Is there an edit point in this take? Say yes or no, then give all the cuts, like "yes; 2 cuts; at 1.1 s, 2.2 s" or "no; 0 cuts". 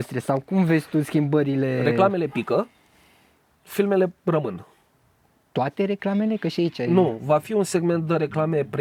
no; 0 cuts